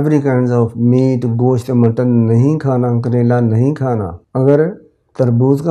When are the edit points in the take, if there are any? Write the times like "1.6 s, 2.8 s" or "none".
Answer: 4.2 s

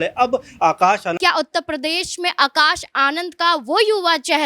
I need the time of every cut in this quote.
1.2 s

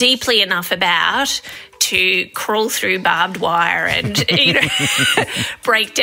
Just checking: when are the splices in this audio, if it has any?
none

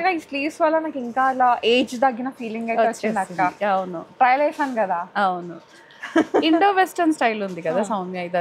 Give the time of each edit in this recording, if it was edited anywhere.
none

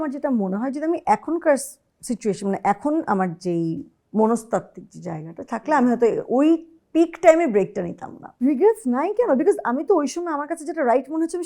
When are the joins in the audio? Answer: 8.2 s

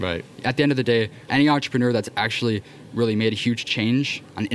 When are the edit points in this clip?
1.2 s

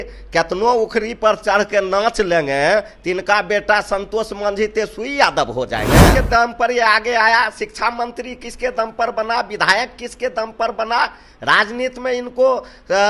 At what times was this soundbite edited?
6.1 s

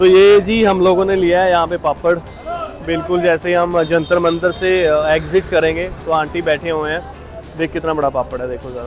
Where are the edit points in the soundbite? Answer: none

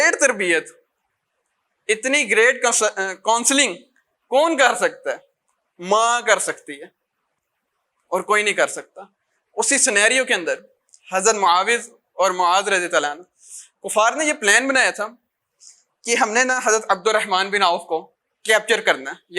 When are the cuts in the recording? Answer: none

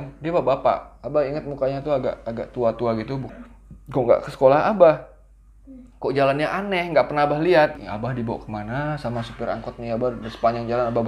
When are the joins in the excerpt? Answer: 3.2 s, 7.8 s

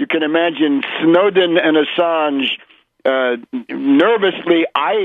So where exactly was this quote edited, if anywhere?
3.7 s

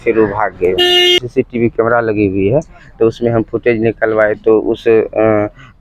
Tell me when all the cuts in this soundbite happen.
1.2 s

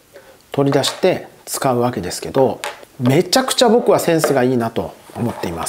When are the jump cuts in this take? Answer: none

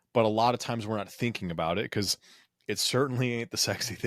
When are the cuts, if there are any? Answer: none

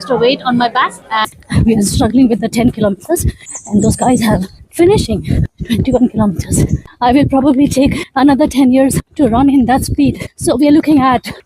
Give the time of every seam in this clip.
1.3 s, 6.8 s

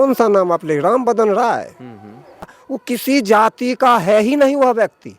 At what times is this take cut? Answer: 2.6 s

